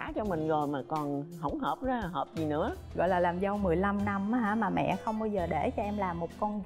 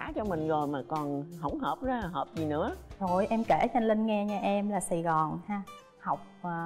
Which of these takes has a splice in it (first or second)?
first